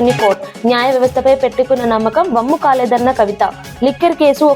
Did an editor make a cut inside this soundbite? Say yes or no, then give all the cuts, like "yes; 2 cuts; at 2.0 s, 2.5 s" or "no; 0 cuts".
no; 0 cuts